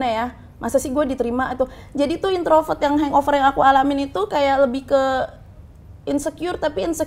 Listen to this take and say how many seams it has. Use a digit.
0